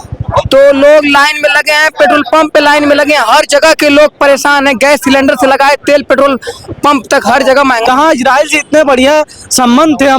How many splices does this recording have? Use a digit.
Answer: 1